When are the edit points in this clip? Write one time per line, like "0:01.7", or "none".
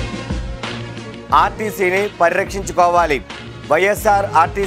0:01.2